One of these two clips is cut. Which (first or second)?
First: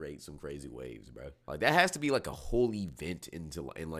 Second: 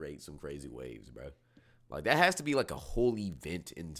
first